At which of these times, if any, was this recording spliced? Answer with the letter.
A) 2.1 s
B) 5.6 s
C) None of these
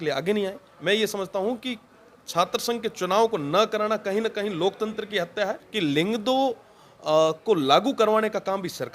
B